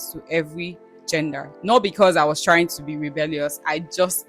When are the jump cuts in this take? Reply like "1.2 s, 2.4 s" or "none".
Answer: 1.4 s